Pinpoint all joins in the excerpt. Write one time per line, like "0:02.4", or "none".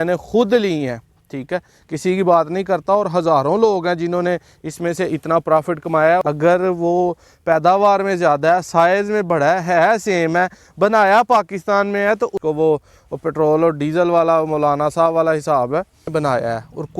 0:06.2
0:12.4
0:16.1